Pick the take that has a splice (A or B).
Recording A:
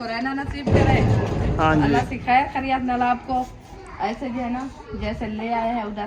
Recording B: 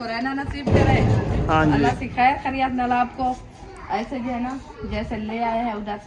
B